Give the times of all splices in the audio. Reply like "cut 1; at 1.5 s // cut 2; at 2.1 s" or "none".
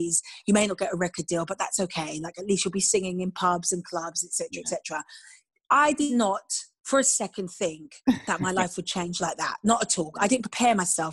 cut 1; at 6.1 s